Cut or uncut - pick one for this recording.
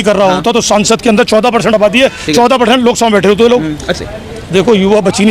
cut